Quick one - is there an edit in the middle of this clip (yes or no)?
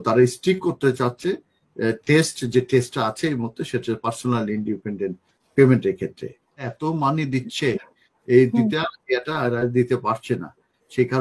yes